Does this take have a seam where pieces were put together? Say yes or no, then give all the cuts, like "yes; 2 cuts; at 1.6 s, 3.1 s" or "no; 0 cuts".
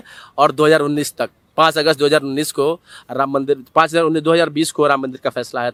no; 0 cuts